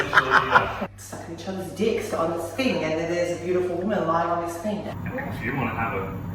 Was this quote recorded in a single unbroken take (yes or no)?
no